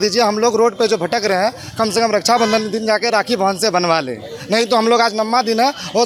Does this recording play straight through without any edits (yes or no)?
yes